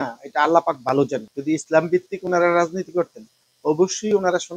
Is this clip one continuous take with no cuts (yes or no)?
no